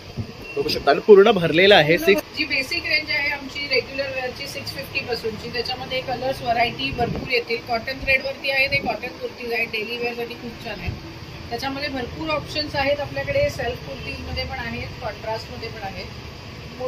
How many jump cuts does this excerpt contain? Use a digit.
1